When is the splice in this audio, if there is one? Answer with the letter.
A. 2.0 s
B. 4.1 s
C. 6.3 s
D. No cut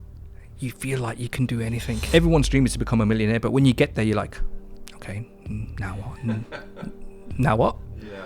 A